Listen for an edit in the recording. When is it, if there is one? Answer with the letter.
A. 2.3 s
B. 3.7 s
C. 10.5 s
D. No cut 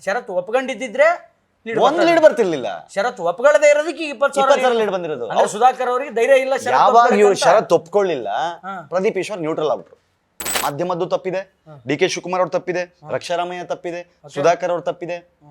C